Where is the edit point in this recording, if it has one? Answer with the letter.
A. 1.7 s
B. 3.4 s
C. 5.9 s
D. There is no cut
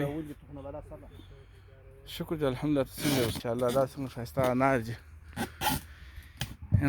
B